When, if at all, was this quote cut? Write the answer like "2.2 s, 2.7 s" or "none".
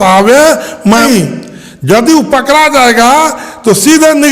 1.0 s